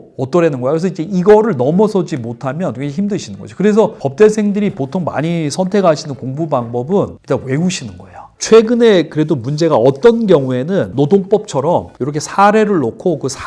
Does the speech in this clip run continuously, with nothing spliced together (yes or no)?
yes